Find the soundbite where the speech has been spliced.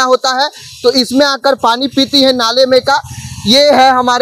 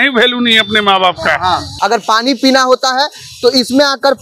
second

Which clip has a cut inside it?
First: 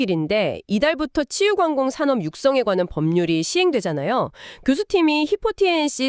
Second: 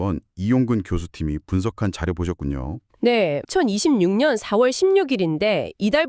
second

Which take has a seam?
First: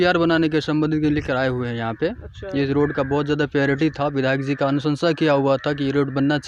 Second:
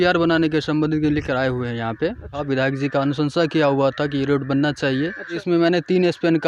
second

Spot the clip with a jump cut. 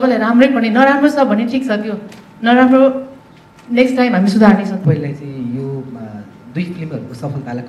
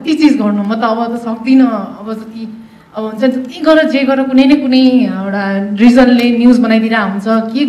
first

